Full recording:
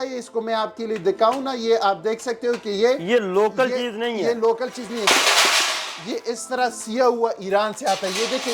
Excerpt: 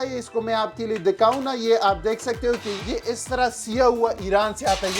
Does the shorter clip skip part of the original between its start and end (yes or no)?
yes